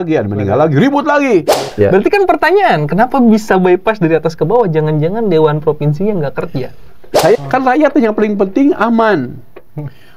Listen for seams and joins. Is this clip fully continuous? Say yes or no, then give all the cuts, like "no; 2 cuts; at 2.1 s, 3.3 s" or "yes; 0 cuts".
no; 2 cuts; at 1.6 s, 7.4 s